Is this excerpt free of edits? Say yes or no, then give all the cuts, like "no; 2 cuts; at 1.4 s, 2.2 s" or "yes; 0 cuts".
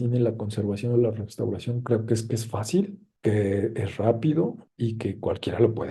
yes; 0 cuts